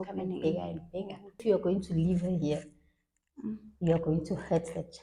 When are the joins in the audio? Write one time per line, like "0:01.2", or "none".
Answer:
0:01.4